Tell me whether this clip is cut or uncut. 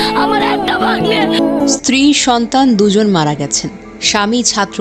cut